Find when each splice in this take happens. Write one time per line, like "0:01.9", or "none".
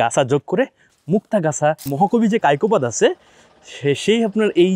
0:01.9